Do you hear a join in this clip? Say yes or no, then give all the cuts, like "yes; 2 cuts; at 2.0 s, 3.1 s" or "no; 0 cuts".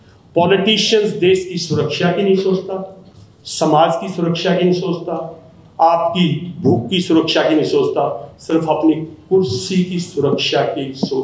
no; 0 cuts